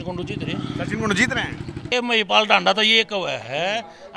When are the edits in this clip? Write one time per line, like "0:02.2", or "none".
0:01.8